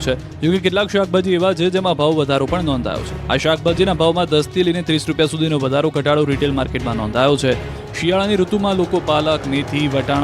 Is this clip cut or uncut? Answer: cut